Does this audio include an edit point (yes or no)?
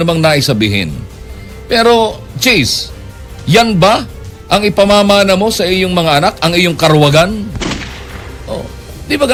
no